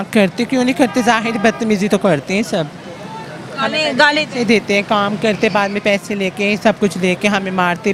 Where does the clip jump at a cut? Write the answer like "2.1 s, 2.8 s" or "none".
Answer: none